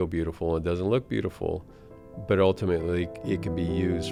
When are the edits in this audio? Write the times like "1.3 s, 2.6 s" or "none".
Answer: none